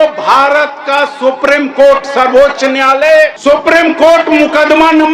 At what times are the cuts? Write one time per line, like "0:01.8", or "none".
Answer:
0:03.1

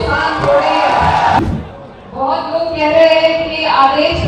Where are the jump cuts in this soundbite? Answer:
0:01.4

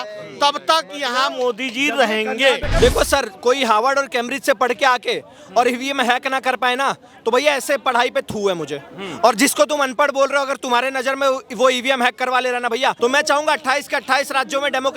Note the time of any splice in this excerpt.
0:02.7
0:13.0

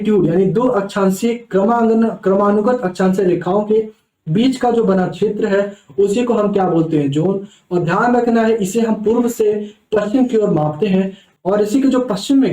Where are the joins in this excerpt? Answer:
0:11.2

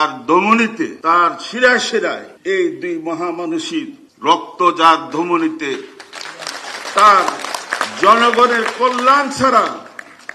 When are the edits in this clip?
0:01.0
0:02.3
0:04.0

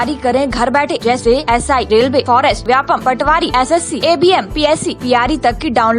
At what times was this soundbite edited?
none

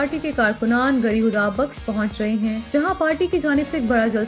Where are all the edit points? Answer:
none

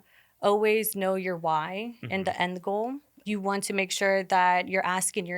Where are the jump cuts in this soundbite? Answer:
0:03.1

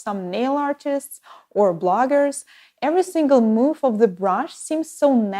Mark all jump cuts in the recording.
0:01.3

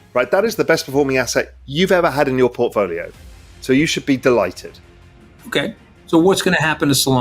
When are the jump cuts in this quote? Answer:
0:04.8

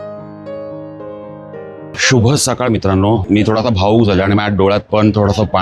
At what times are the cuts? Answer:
0:01.9

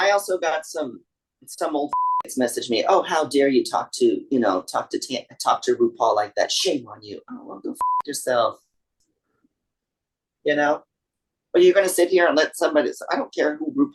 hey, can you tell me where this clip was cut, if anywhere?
none

